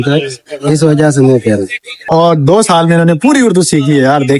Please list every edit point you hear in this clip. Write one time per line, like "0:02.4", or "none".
0:02.0